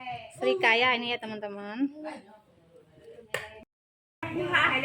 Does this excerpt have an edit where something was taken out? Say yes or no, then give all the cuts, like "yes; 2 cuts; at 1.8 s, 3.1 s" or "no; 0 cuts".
yes; 1 cut; at 3.6 s